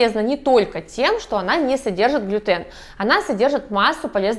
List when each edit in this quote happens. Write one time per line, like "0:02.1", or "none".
none